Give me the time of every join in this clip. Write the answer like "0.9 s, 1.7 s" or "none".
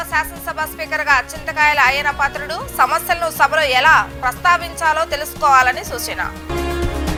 none

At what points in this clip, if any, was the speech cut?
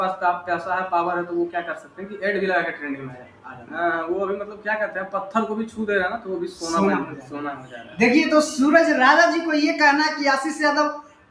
3.7 s

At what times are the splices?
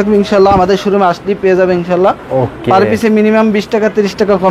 none

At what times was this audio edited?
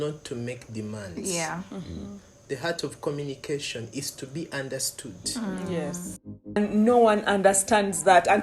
6.6 s

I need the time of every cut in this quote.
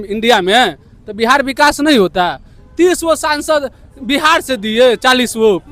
none

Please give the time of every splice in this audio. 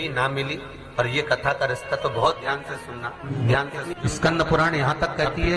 3.2 s, 3.9 s

